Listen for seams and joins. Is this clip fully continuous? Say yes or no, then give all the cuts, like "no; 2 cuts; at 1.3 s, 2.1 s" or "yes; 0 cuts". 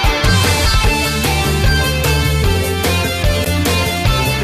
no; 1 cut; at 1.1 s